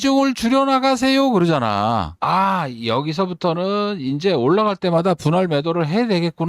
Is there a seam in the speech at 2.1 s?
yes; 1 cut; at 2.1 s

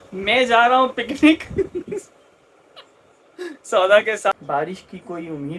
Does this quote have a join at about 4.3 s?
yes; 1 cut; at 4.3 s

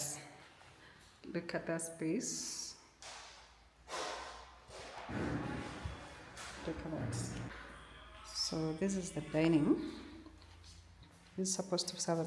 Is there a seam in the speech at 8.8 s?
no; 1 cut; at 7.5 s

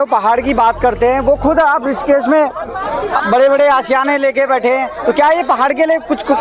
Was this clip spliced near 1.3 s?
no; 0 cuts

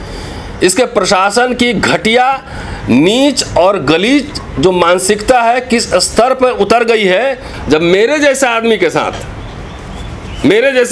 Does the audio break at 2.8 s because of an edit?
no; 1 cut; at 7.5 s

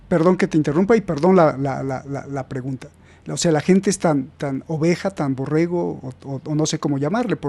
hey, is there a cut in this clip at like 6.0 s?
no; 0 cuts

